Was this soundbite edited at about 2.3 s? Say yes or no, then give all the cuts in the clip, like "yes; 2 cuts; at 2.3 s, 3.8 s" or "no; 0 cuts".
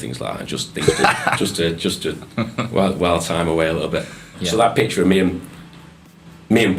no; 1 cut; at 4.3 s